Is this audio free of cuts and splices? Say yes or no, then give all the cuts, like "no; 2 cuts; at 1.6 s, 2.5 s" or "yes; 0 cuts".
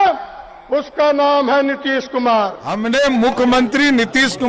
no; 1 cut; at 2.6 s